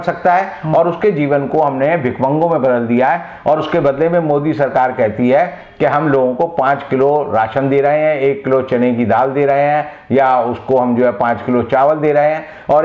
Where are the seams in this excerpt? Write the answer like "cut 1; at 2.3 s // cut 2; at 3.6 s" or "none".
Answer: none